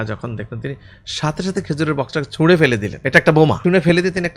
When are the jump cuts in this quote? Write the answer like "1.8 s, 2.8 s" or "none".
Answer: 2.9 s, 3.6 s